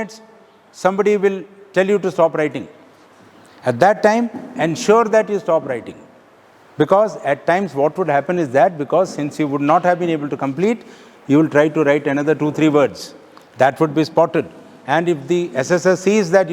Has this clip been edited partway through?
no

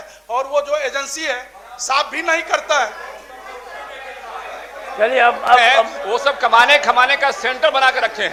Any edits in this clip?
no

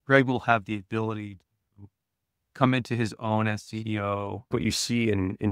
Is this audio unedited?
no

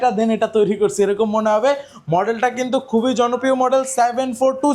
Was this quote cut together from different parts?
no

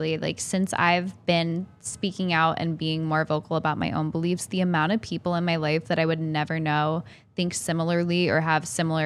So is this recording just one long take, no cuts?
yes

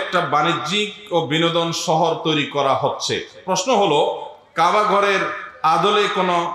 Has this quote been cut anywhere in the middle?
no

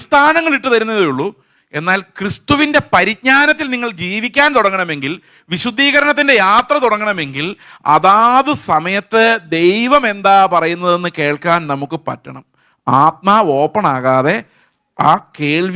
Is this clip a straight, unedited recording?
yes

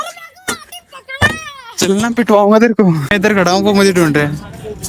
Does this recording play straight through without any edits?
no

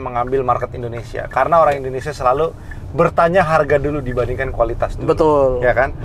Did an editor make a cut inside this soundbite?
no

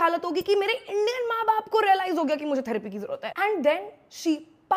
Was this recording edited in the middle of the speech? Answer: yes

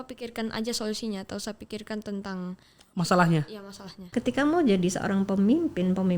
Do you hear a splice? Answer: yes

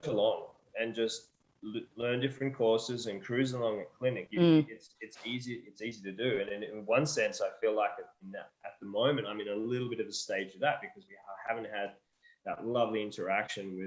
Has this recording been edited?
no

